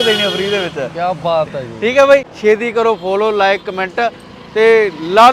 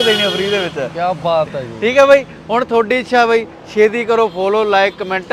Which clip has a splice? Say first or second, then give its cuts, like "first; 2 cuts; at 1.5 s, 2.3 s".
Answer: first; 1 cut; at 2.3 s